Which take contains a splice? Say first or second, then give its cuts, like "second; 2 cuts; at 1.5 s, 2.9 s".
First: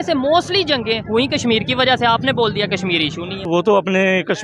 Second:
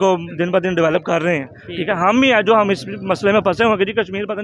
first; 1 cut; at 3.5 s